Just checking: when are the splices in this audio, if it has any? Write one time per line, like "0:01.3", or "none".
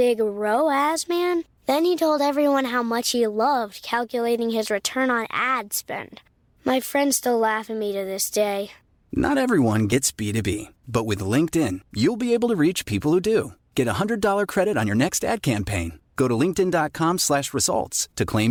none